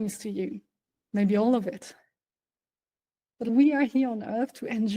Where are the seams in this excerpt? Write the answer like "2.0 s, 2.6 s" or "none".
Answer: 3.5 s